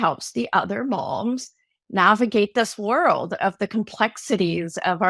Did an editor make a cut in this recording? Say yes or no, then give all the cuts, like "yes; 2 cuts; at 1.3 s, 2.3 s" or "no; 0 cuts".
no; 0 cuts